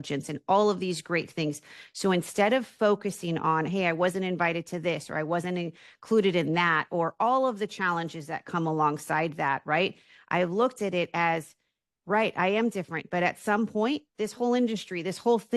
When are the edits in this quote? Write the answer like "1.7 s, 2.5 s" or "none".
none